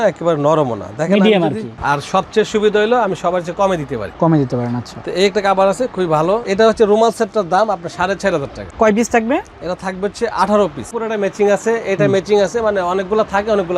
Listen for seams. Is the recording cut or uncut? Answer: cut